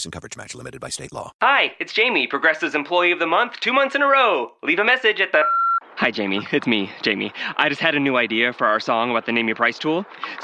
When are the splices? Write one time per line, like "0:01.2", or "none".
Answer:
0:01.3